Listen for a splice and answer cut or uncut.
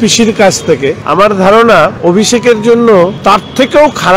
cut